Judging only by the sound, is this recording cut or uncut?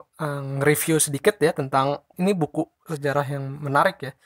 cut